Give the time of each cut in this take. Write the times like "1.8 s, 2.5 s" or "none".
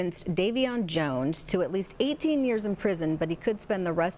none

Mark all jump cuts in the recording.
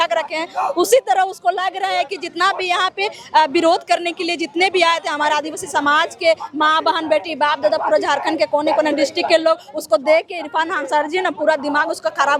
none

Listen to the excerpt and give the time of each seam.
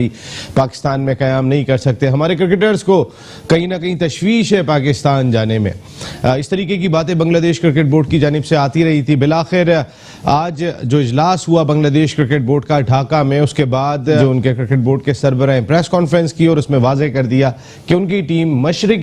none

